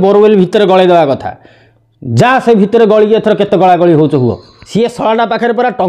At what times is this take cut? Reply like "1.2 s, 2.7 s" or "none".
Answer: 4.5 s